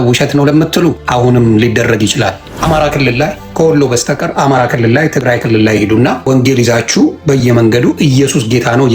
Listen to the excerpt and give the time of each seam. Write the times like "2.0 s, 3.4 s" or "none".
1.0 s, 2.5 s, 3.4 s, 6.3 s

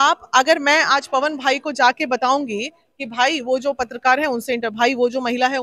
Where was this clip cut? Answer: none

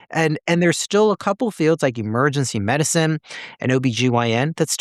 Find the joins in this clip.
none

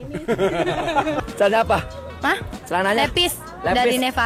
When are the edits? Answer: 1.2 s

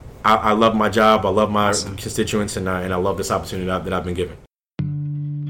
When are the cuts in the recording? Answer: 4.4 s

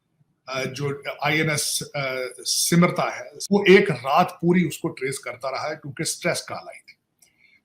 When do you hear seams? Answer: 3.4 s

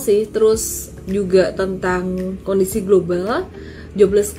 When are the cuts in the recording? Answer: 1.0 s

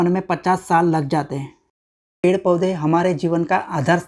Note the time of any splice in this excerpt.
2.2 s

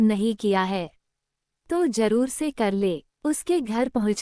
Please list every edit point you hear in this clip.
3.1 s

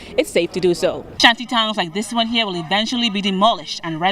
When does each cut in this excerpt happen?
1.1 s

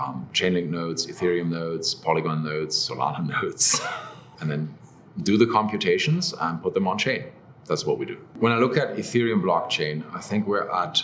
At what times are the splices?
4.3 s, 8.2 s

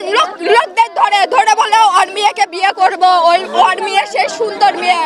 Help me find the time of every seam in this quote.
none

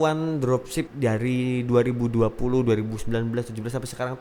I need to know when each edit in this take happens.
0.9 s

